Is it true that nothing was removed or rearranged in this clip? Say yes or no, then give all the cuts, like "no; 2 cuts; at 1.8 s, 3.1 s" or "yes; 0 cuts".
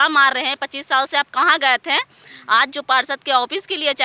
yes; 0 cuts